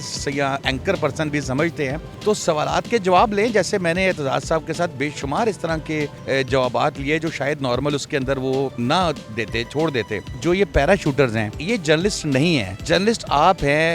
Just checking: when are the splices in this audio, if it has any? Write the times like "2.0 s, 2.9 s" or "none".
2.1 s, 6.2 s, 8.7 s, 10.3 s, 11.6 s, 12.7 s